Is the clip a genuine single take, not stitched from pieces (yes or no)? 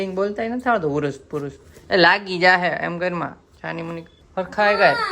no